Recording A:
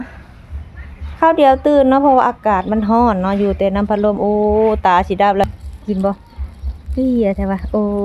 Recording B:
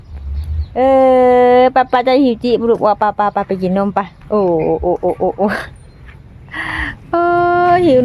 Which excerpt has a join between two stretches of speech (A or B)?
A